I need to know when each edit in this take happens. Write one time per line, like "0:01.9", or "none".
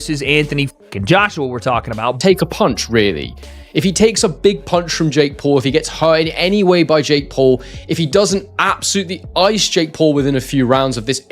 0:02.2